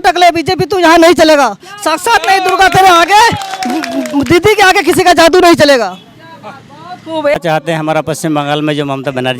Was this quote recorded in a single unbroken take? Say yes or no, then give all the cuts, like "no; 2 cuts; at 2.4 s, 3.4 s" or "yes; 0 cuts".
no; 1 cut; at 7.4 s